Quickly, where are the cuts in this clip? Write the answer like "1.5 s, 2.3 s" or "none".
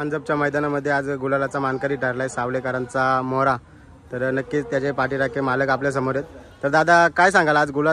none

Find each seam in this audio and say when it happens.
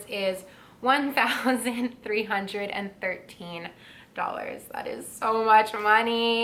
none

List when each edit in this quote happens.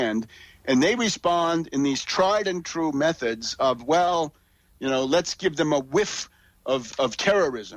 none

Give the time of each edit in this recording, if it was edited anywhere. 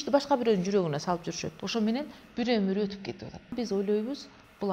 1.5 s, 3.5 s

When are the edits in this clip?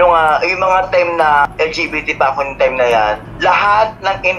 1.5 s, 3.3 s

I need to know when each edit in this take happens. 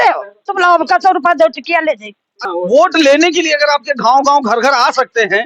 2.4 s

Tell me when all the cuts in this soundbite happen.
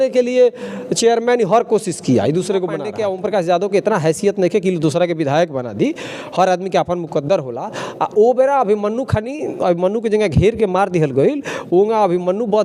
2.9 s

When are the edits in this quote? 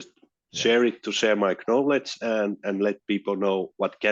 none

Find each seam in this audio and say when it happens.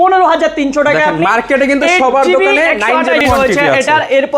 3.2 s

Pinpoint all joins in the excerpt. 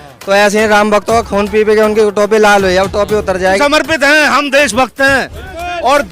3.6 s

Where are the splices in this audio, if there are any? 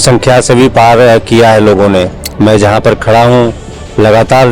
2.2 s

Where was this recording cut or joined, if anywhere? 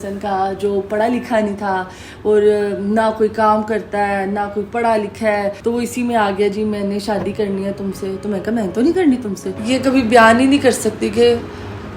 5.6 s, 9.5 s

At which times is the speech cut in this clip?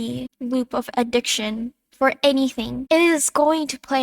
2.8 s

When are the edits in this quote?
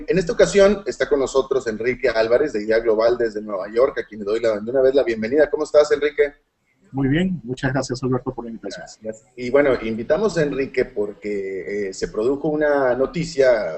7.7 s

